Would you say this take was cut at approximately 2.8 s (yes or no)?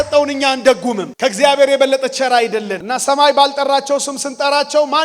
yes